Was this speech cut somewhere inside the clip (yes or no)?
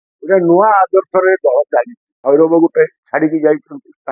yes